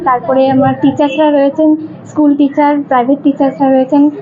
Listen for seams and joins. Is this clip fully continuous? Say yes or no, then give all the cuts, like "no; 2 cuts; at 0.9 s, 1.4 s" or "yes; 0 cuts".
yes; 0 cuts